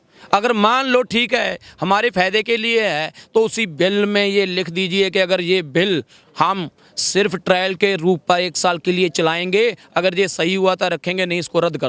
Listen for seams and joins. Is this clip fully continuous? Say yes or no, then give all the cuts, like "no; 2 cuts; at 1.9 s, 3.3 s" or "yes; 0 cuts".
yes; 0 cuts